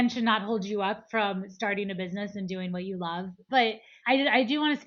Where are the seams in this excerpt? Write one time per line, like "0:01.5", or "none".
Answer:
0:03.7